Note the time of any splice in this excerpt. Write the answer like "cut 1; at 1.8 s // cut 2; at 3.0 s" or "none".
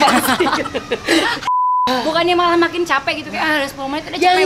cut 1; at 1.8 s